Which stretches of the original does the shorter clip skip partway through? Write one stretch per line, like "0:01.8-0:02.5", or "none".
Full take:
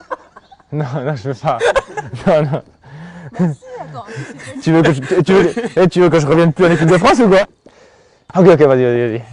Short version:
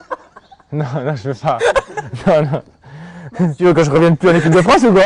0:03.6-0:05.9